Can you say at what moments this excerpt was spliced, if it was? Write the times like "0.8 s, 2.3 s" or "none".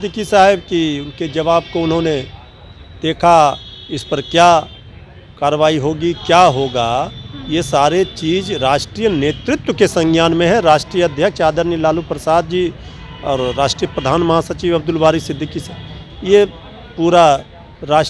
none